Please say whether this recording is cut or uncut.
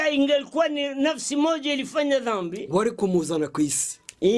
uncut